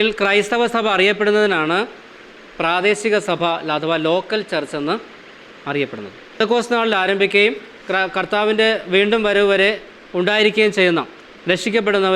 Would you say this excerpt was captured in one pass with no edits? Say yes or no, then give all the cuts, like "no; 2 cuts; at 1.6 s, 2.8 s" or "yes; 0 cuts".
no; 1 cut; at 6.4 s